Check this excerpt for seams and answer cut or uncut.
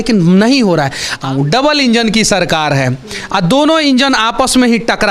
cut